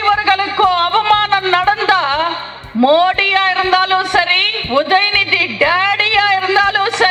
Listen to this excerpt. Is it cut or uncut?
uncut